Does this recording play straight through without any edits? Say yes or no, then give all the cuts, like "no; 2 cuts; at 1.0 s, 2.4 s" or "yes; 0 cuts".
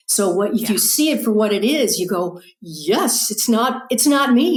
yes; 0 cuts